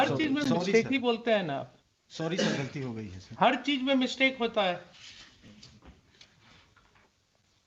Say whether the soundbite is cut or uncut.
uncut